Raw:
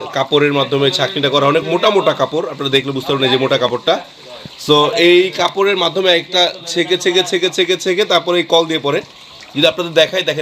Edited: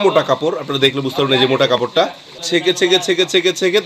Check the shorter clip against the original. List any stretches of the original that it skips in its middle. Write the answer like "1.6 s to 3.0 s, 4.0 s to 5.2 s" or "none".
4.3 s to 6.6 s